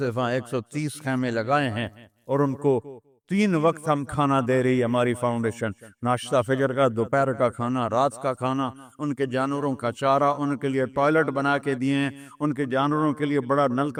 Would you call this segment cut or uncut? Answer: uncut